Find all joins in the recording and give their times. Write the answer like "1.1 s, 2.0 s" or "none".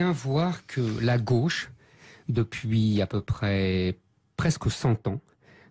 3.9 s